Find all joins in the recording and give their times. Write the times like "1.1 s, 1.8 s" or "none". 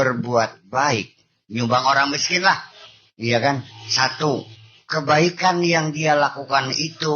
none